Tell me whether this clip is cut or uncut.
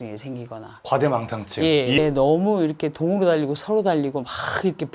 cut